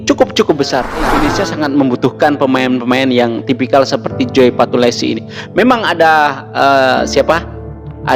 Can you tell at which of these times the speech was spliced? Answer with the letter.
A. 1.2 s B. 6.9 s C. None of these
A